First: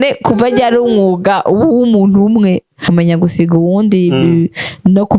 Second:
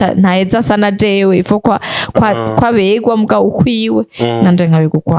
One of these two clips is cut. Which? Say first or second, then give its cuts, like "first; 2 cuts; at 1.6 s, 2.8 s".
first; 1 cut; at 2.8 s